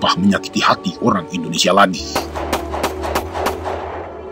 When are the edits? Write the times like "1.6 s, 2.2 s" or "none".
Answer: none